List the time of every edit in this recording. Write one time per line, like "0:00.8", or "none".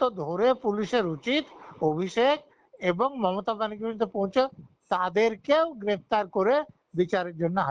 none